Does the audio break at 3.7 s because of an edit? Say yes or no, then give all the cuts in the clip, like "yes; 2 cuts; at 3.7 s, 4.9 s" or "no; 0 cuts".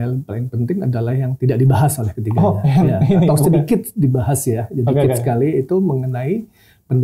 no; 0 cuts